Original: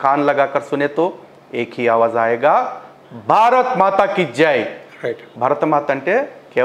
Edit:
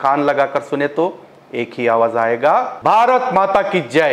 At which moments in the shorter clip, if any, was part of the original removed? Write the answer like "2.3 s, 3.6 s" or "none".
2.7 s